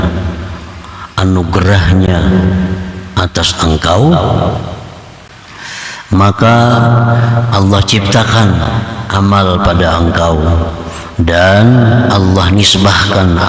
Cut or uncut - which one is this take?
uncut